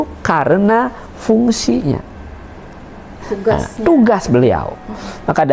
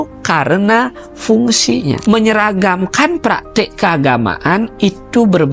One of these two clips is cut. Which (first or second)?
second